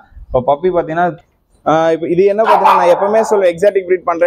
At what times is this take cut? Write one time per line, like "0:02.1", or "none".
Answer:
0:01.2